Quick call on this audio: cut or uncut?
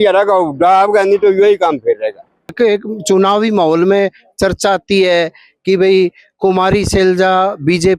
cut